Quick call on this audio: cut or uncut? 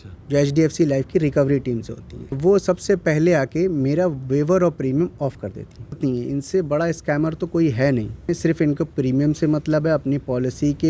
cut